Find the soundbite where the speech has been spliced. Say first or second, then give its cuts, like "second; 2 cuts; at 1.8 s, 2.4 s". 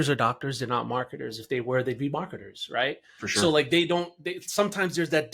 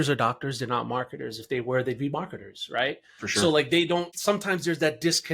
second; 1 cut; at 4.1 s